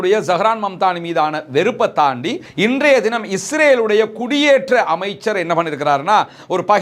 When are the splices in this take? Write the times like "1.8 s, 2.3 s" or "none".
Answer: none